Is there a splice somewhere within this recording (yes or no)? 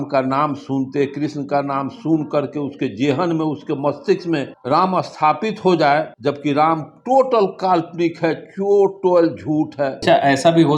yes